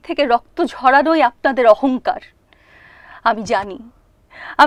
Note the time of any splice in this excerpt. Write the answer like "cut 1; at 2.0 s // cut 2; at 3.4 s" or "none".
none

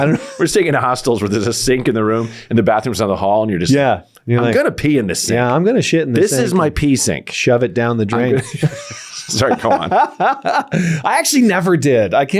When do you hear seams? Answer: none

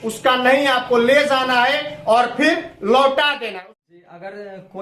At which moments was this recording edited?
cut 1; at 3.4 s

